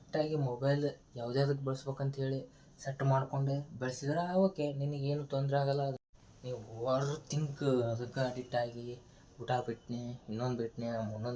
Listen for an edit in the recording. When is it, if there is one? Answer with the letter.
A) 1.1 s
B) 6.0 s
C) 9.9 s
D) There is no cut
B